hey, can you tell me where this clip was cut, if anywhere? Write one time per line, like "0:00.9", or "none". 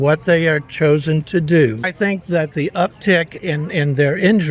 0:01.8